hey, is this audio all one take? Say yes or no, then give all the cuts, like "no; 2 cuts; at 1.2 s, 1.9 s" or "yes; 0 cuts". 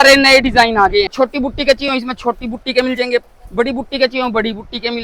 no; 1 cut; at 1.1 s